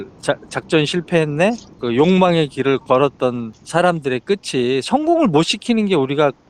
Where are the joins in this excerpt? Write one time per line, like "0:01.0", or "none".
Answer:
0:01.7
0:03.5